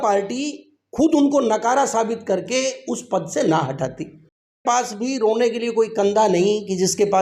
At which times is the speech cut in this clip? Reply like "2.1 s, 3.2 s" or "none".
4.6 s